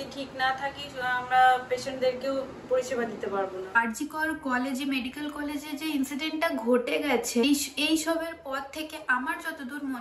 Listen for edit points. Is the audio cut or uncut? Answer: cut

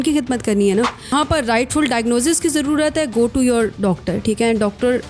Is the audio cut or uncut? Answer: cut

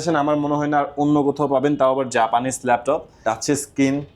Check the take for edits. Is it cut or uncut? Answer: cut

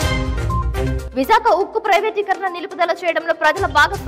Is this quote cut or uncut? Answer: cut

